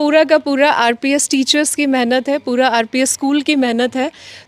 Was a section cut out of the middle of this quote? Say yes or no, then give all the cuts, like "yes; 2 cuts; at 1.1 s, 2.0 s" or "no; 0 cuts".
no; 0 cuts